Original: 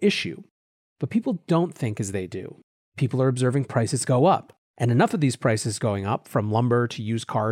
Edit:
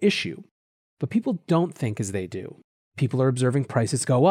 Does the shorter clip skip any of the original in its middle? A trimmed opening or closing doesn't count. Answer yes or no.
no